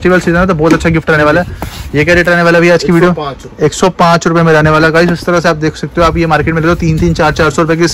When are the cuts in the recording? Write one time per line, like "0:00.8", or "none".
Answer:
none